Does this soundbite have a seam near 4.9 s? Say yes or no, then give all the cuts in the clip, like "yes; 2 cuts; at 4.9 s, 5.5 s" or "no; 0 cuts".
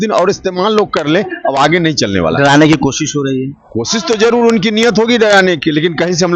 no; 0 cuts